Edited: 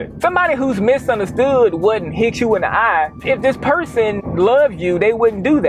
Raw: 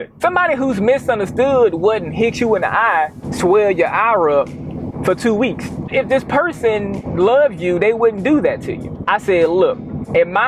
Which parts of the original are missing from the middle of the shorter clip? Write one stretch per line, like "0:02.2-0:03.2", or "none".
0:03.2-0:05.8
0:06.9-0:07.0